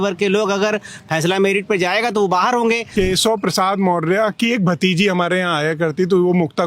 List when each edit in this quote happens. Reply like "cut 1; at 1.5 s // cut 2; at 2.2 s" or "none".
cut 1; at 2.9 s